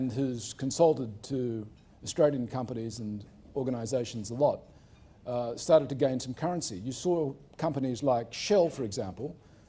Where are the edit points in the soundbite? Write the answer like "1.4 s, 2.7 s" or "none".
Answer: 4.7 s